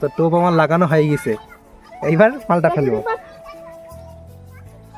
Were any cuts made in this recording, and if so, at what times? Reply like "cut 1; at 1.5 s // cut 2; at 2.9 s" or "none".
none